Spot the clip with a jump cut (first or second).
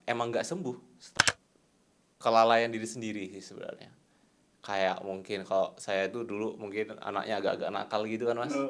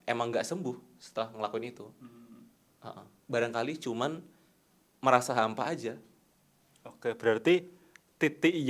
first